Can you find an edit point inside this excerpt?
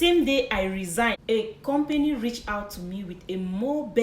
yes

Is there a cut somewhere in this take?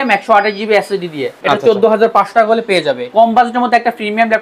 yes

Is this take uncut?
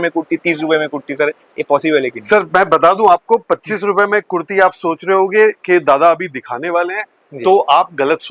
yes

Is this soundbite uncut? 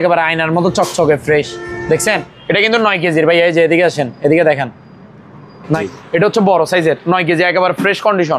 no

